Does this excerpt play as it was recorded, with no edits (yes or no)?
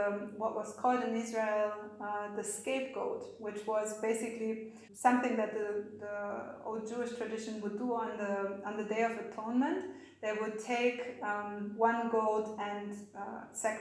yes